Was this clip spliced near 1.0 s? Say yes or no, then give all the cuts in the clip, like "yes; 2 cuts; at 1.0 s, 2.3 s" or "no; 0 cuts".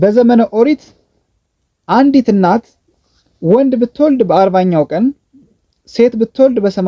no; 0 cuts